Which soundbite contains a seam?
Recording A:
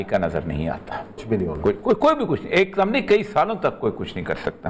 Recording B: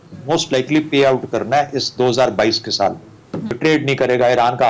B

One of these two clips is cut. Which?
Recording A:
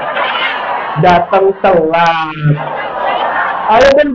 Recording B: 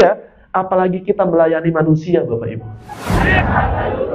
B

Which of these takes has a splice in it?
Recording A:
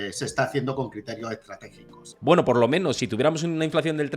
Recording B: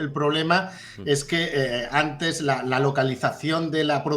A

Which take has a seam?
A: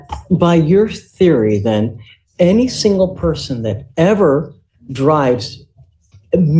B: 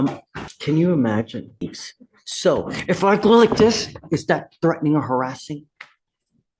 B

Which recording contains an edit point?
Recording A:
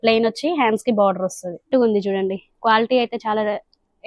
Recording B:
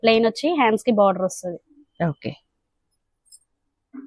A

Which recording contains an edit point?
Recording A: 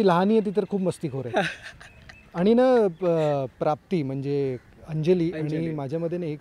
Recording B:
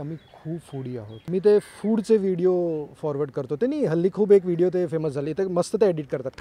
B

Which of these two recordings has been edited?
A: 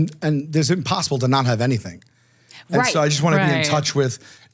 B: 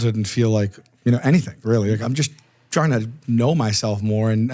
B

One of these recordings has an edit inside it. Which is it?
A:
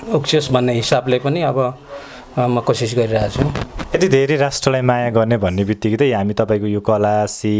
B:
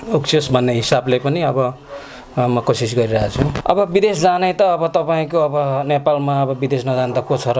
B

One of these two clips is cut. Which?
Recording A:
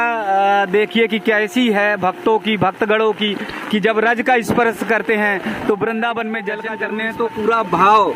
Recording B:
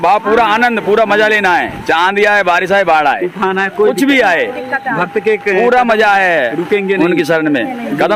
A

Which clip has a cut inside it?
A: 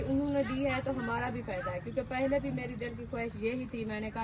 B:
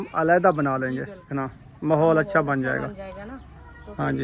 B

